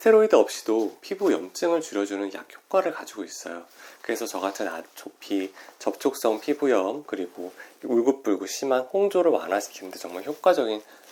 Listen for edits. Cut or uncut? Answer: uncut